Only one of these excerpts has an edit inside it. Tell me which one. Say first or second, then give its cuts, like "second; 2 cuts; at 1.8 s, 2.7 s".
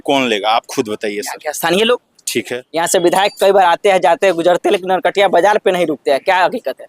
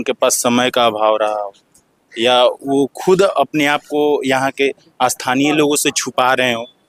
first; 1 cut; at 2.6 s